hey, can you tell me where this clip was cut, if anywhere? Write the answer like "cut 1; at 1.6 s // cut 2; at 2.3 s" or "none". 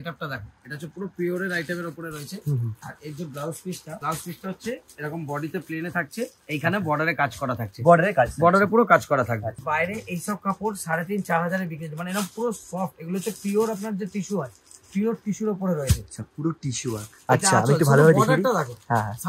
cut 1; at 2.8 s // cut 2; at 4.0 s // cut 3; at 9.6 s // cut 4; at 17.1 s